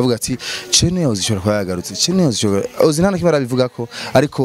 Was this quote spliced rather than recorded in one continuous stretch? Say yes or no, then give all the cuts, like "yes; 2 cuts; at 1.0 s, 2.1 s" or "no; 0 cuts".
no; 0 cuts